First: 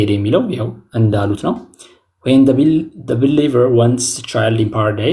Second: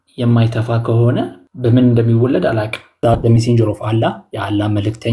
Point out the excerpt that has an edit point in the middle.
second; 2 cuts; at 1.4 s, 2.9 s

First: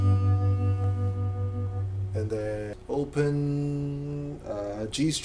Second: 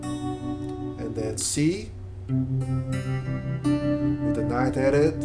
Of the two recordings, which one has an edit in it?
first; 1 cut; at 2.7 s

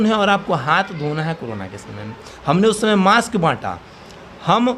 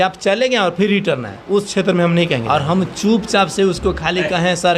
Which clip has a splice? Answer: second; 1 cut; at 2.4 s

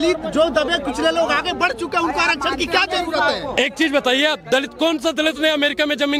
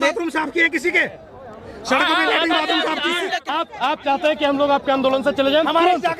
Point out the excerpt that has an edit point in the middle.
second; 1 cut; at 3.5 s

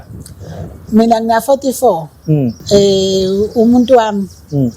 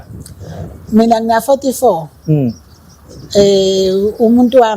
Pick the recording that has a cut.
first; 1 cut; at 2.6 s

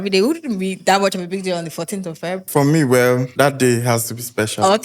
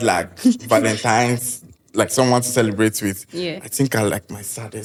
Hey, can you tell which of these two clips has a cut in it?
first; 2 cuts; at 2.4 s, 3.3 s

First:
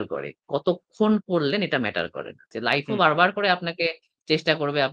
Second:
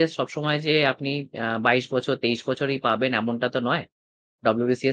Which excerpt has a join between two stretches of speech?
first; 1 cut; at 2.5 s

